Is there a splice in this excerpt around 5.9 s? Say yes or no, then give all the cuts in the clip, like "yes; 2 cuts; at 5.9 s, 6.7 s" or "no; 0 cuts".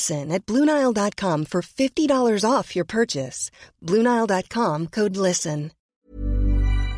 yes; 1 cut; at 5.9 s